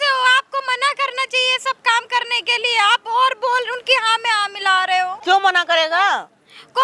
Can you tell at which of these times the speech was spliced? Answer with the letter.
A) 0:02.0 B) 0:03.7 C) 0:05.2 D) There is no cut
C